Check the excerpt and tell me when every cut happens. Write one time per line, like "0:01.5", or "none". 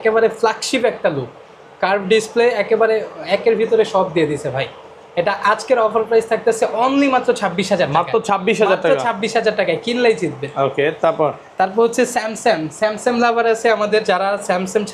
none